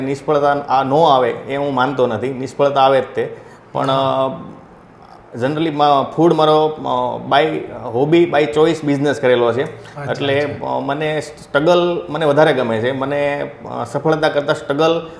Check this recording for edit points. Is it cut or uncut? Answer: uncut